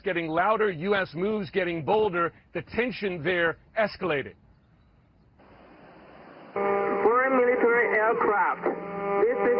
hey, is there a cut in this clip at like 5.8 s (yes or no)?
yes